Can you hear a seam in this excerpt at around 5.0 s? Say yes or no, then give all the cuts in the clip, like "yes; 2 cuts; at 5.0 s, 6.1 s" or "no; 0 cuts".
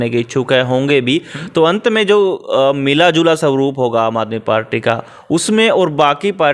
no; 0 cuts